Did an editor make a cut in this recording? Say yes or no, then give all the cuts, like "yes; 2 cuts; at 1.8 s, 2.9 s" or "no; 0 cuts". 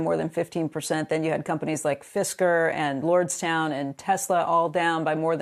no; 0 cuts